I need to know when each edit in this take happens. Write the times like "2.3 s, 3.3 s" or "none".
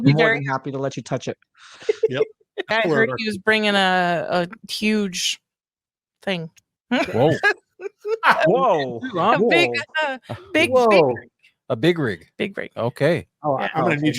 2.7 s

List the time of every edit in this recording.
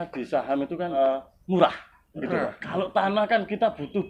1.0 s

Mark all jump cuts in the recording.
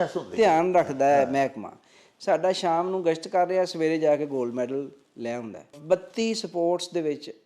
5.8 s

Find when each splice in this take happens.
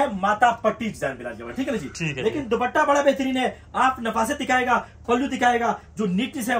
none

